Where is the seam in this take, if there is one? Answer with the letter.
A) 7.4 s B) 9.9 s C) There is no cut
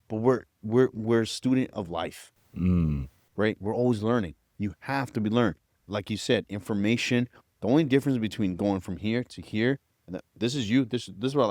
C